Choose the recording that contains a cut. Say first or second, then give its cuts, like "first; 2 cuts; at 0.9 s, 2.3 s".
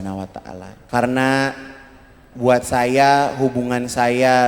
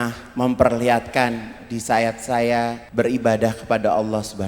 second; 1 cut; at 2.8 s